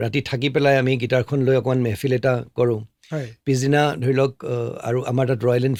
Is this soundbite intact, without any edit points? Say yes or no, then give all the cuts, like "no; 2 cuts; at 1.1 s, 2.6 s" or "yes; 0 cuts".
yes; 0 cuts